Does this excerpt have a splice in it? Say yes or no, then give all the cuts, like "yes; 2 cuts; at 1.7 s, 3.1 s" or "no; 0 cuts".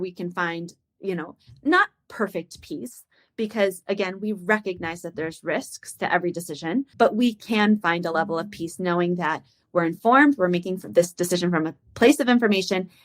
yes; 1 cut; at 6.9 s